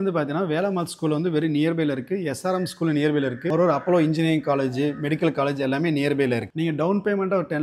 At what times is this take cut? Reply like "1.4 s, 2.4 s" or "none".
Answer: 6.5 s